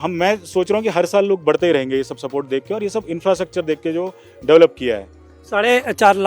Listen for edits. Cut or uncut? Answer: uncut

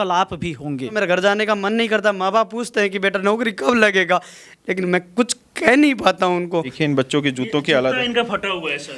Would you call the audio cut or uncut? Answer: cut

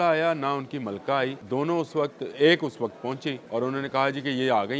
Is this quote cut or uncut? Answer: cut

